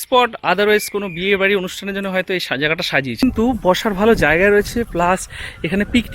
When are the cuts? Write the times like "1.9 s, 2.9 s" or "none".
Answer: 3.2 s